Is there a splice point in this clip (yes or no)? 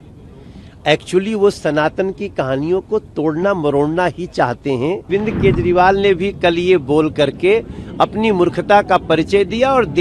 yes